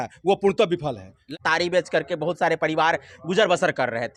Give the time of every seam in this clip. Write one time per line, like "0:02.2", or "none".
none